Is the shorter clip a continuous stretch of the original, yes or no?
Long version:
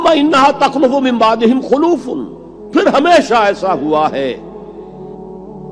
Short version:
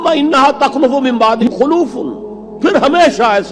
no